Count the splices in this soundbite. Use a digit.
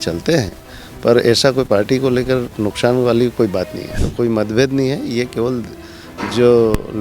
1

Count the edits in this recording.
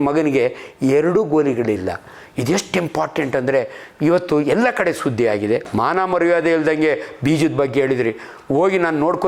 1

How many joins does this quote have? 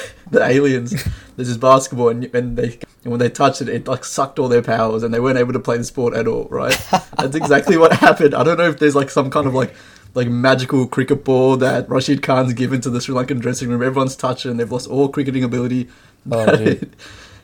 1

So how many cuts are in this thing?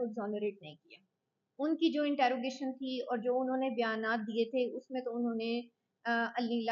0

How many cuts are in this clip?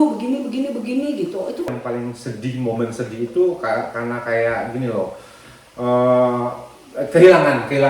1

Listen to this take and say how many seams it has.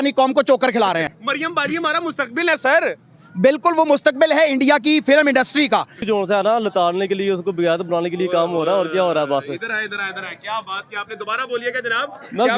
2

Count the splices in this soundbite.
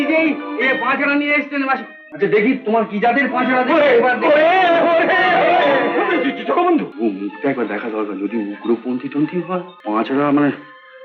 3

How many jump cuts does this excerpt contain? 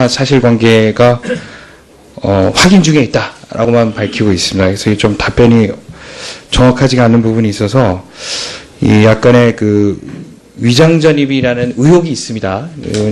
1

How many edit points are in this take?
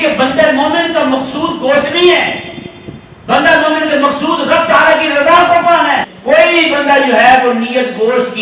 1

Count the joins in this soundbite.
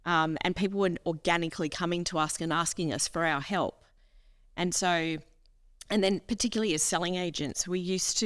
0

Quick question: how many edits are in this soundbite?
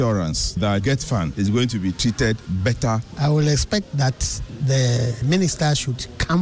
3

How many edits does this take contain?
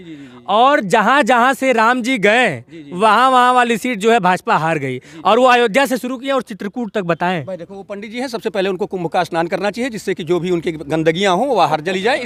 0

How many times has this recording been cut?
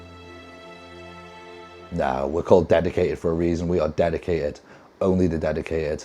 0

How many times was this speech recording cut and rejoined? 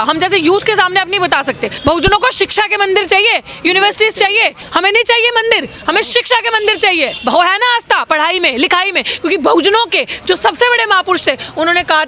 3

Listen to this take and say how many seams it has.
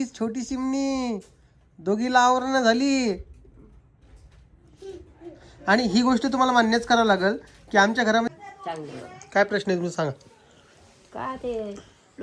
1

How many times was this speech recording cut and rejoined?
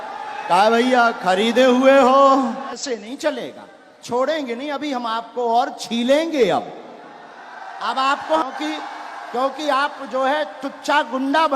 2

